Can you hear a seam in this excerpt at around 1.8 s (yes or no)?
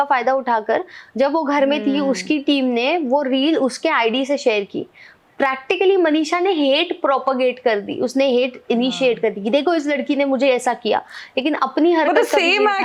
no